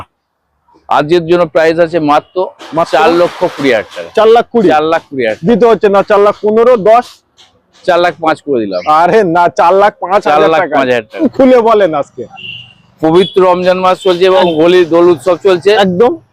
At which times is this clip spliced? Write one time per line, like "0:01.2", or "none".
0:11.3